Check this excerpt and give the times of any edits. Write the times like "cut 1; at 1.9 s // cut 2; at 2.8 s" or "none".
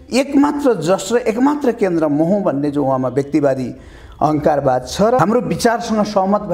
cut 1; at 5.2 s

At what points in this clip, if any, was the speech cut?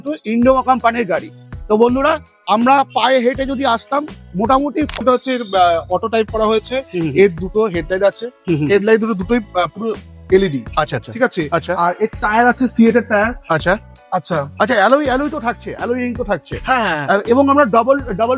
cut 1; at 5.0 s

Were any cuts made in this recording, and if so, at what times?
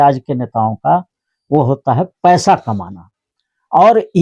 none

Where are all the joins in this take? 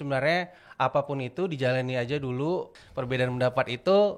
cut 1; at 2.7 s

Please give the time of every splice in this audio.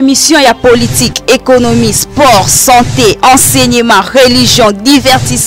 none

